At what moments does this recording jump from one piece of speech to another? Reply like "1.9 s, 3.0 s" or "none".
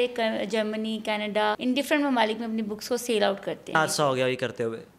1.6 s, 3.7 s